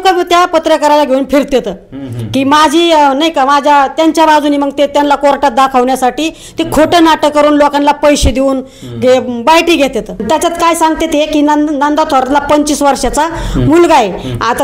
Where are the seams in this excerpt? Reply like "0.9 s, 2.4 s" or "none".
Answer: 10.2 s